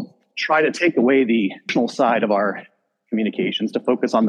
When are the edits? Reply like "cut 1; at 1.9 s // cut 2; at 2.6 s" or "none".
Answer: cut 1; at 1.7 s

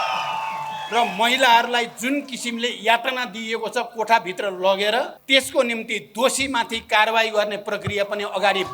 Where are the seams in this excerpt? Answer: cut 1; at 5.2 s

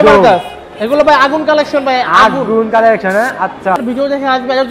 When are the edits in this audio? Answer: cut 1; at 3.8 s

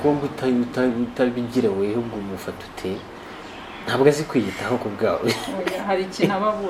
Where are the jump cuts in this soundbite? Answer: none

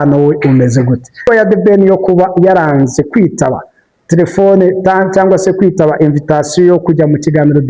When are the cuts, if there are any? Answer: cut 1; at 1.3 s

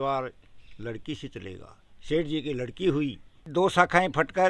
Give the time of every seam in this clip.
cut 1; at 3.4 s

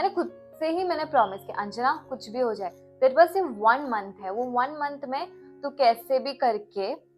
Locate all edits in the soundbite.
none

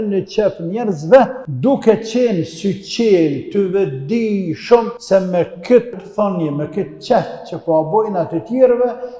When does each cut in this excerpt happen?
cut 1; at 1.4 s // cut 2; at 5.0 s // cut 3; at 6.0 s

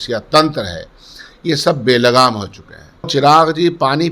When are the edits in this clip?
cut 1; at 3.1 s

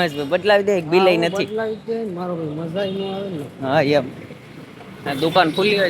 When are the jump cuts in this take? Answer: none

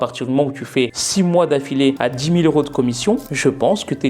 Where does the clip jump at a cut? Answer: cut 1; at 1.0 s // cut 2; at 2.0 s

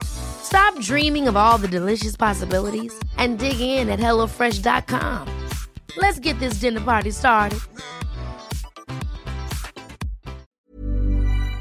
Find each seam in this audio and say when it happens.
cut 1; at 10.5 s

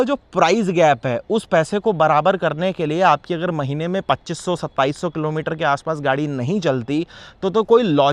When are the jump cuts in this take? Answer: none

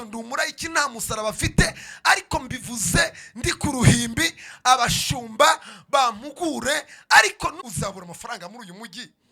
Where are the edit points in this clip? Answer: cut 1; at 7.6 s

